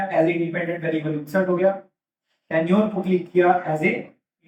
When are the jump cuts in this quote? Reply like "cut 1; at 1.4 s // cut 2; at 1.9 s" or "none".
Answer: none